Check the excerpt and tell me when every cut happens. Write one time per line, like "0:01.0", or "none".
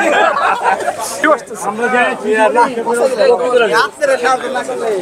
none